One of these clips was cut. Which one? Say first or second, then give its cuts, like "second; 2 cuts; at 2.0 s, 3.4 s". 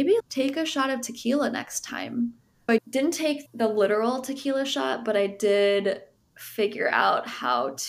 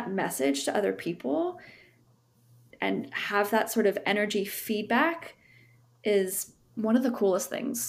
first; 1 cut; at 2.5 s